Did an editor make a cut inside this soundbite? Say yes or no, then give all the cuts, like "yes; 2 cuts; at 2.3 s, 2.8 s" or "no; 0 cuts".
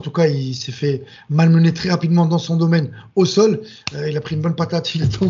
no; 0 cuts